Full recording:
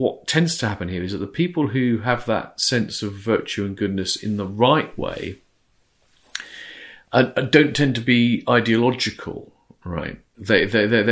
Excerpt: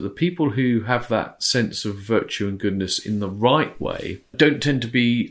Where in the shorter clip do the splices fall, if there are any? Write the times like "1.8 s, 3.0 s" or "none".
4.3 s